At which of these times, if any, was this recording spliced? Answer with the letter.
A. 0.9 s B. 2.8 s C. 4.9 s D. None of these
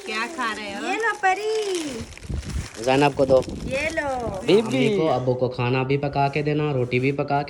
C